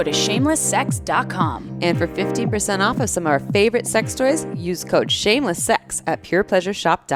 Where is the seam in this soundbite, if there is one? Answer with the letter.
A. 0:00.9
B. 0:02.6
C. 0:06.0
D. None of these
D